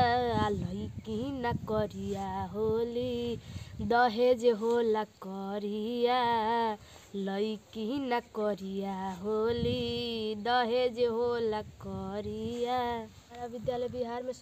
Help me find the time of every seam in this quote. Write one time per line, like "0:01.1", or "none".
0:13.4